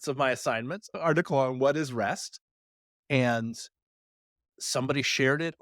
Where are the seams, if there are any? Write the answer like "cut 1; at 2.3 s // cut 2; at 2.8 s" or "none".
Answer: none